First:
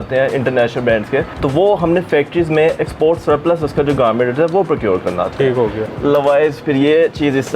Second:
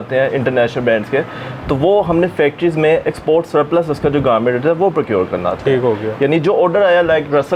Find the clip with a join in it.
first; 2 cuts; at 1.3 s, 5.8 s

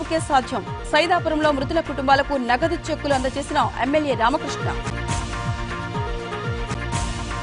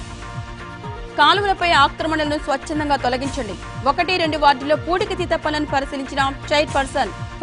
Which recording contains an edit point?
second; 1 cut; at 1.1 s

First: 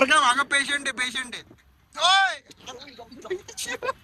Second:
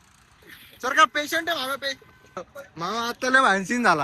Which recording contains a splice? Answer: second; 1 cut; at 2.5 s

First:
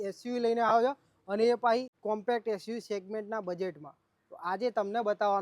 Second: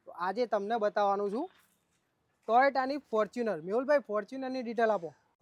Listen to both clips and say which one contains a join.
first; 1 cut; at 1.9 s

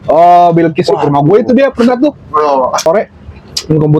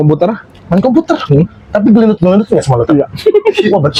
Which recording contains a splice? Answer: first; 1 cut; at 2.9 s

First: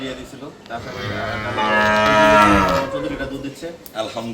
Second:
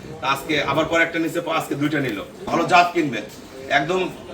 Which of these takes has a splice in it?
second; 1 cut; at 2.4 s

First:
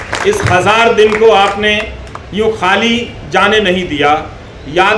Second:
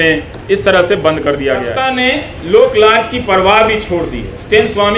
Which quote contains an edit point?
second; 1 cut; at 1.8 s

